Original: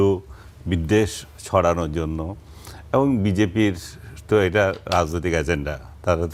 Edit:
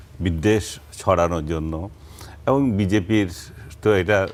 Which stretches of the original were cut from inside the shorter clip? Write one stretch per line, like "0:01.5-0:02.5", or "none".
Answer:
none